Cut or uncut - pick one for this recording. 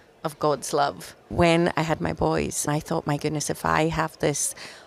cut